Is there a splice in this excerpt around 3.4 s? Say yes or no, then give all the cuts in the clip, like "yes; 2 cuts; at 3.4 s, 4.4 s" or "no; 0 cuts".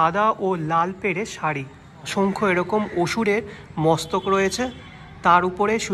no; 1 cut; at 2.1 s